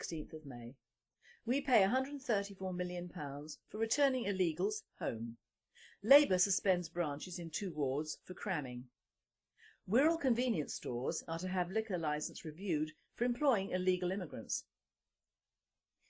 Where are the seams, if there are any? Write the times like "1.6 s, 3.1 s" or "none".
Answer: 5.1 s

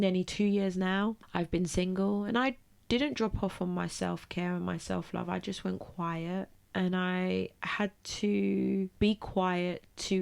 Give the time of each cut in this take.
1.2 s, 6.6 s, 8.9 s

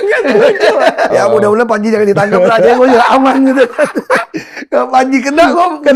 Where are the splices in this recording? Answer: 1.1 s

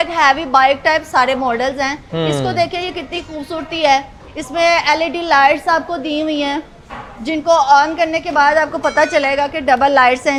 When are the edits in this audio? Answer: none

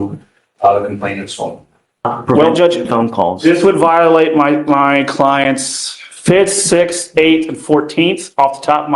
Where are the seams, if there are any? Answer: 2.1 s

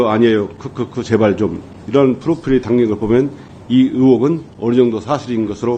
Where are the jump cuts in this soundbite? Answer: none

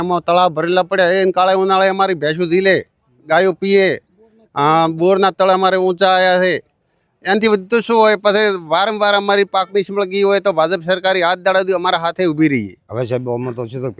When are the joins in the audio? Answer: 12.8 s

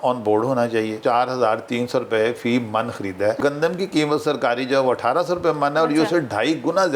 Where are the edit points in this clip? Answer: 1.0 s, 3.4 s

